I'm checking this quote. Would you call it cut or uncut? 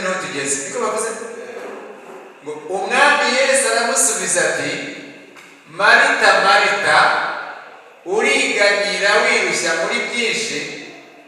uncut